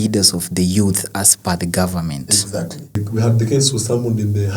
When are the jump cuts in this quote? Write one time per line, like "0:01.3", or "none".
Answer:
0:03.0

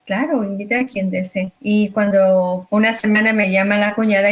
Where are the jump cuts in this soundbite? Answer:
none

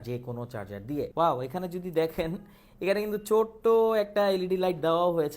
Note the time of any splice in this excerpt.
0:01.1

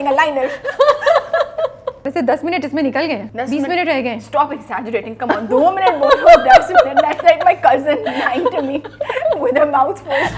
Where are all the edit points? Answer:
0:02.0
0:03.3

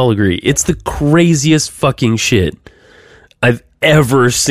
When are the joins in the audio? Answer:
none

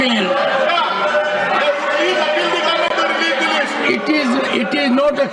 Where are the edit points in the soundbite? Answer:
none

